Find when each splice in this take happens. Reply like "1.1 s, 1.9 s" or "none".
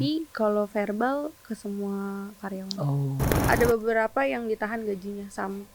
3.3 s